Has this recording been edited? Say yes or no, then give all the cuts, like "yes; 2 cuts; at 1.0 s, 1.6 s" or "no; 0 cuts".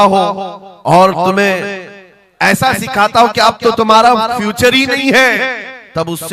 no; 0 cuts